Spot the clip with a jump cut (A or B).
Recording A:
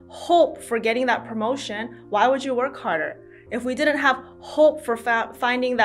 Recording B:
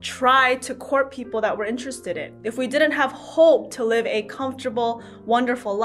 B